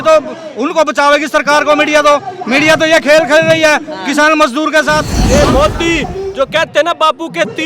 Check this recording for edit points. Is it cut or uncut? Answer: cut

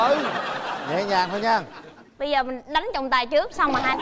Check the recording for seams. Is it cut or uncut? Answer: uncut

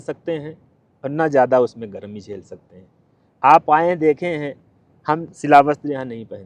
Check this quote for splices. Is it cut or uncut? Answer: uncut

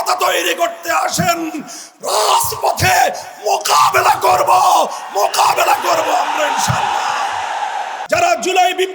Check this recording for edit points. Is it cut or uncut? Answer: cut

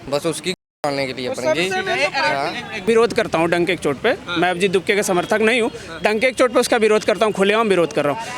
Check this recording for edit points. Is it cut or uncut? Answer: cut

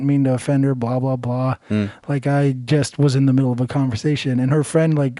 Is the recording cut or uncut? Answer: uncut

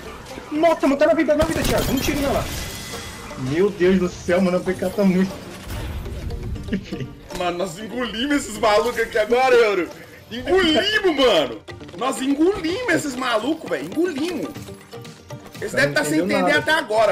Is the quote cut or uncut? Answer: uncut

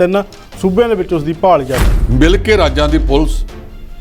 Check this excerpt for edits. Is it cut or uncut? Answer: cut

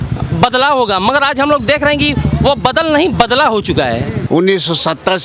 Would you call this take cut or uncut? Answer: cut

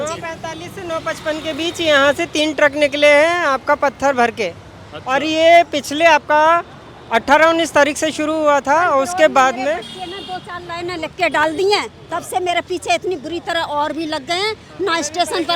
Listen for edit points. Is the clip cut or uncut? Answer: uncut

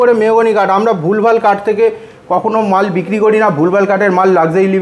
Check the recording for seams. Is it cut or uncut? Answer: uncut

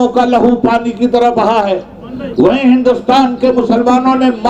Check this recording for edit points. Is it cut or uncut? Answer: uncut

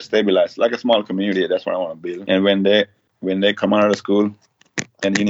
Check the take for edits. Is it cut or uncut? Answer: cut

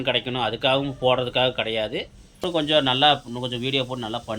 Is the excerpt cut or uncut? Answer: cut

